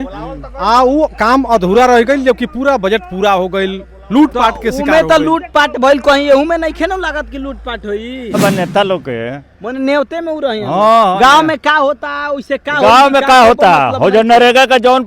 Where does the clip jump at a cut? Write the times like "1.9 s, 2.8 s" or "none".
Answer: 8.4 s